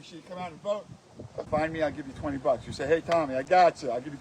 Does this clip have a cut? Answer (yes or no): yes